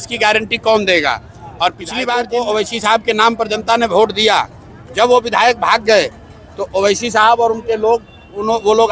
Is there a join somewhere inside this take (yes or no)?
yes